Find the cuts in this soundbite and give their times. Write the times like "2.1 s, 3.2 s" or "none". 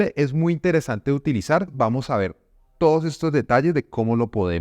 1.7 s